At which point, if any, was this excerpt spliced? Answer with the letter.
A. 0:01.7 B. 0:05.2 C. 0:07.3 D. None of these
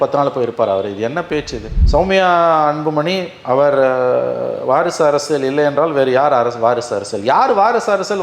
A